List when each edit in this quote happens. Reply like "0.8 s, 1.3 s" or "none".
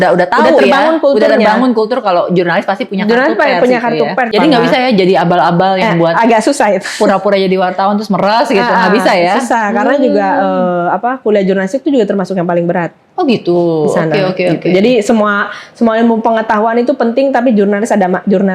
4.3 s